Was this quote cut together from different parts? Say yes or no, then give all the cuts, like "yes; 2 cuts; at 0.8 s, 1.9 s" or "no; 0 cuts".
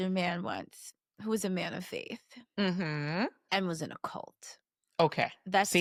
no; 0 cuts